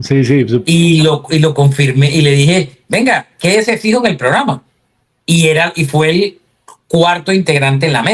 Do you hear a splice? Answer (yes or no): no